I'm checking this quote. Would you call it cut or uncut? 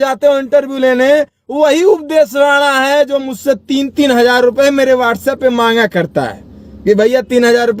uncut